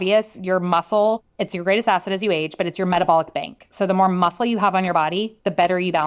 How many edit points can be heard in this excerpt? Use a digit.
1